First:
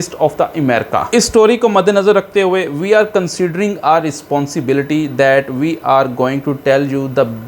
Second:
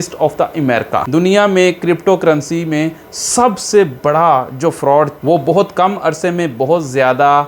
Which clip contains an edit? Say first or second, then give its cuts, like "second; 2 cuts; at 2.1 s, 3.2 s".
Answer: second; 2 cuts; at 1.0 s, 5.2 s